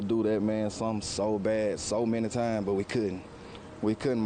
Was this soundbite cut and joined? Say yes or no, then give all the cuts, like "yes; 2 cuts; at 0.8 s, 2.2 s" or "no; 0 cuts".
no; 0 cuts